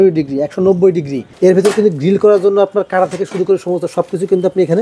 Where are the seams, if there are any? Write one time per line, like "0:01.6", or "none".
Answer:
0:01.2